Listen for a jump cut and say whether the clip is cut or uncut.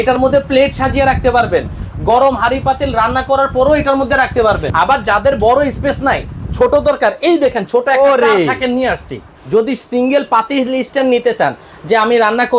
cut